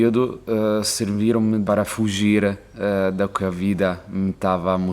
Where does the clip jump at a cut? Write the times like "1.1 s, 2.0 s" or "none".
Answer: 1.6 s

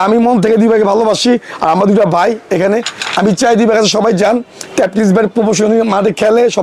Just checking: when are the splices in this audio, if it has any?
none

